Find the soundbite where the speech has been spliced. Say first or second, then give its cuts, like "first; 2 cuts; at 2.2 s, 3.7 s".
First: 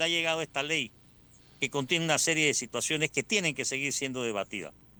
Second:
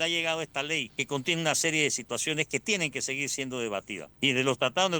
second; 2 cuts; at 0.9 s, 4.0 s